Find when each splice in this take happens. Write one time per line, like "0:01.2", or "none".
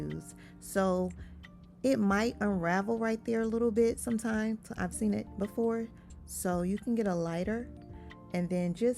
none